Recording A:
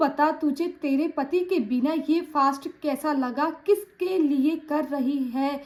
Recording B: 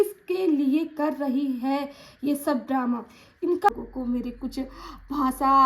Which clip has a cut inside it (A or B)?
B